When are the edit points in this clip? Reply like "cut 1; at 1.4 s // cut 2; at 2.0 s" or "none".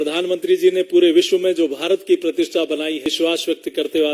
cut 1; at 3.1 s